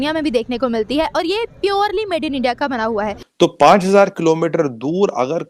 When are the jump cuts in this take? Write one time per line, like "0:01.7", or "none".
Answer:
0:03.2

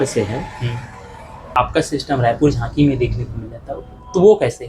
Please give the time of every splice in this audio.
0:01.5

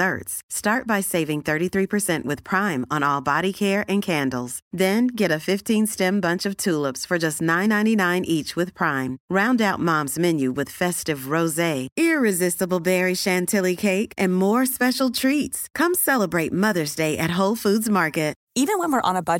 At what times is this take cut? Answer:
0:18.4

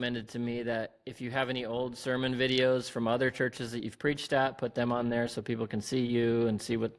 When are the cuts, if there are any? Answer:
none

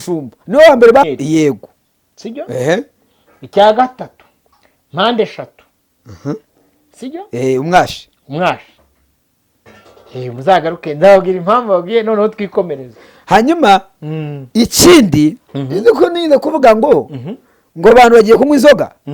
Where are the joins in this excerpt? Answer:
0:01.0

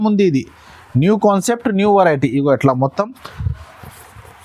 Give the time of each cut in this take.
none

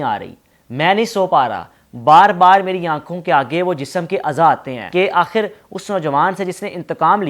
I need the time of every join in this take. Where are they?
0:04.7

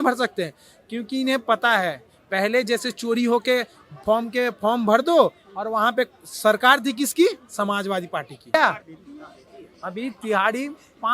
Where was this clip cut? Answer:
0:08.5

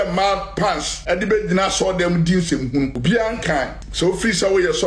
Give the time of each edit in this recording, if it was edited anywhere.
0:00.9
0:03.0
0:03.8

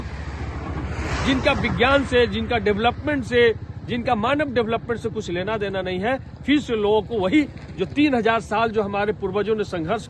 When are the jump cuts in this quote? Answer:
none

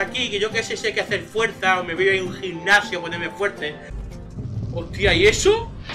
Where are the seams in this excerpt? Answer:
0:03.9

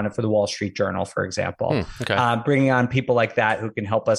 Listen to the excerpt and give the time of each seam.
none

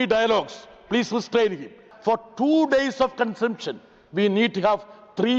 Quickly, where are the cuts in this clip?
0:01.8

